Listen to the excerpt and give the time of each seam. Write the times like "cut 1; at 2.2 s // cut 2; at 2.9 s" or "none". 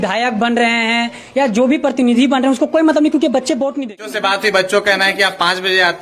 cut 1; at 4.2 s